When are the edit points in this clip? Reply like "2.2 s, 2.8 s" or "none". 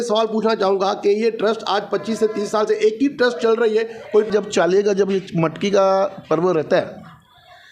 4.3 s

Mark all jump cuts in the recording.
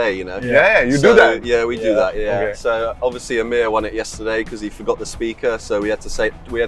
none

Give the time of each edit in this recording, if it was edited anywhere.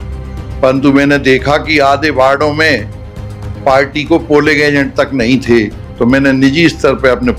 none

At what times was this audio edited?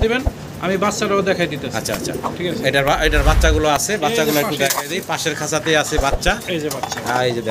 none

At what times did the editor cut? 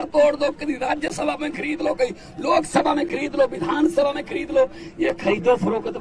none

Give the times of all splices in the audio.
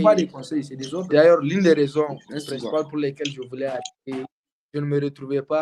1.0 s

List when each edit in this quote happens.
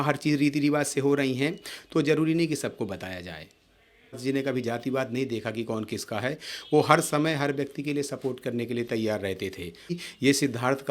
4.2 s, 10.0 s

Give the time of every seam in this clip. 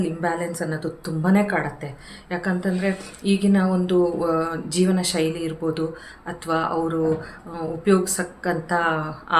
none

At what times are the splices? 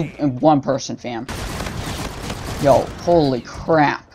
1.4 s

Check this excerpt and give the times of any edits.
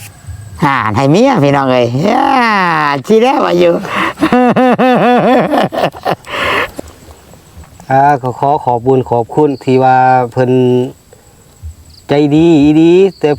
6.7 s

